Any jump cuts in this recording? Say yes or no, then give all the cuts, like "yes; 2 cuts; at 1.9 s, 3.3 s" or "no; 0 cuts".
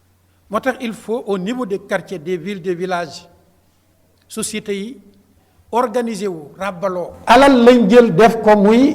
yes; 1 cut; at 7.1 s